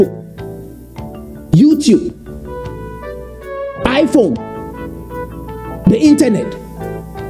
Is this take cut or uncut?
cut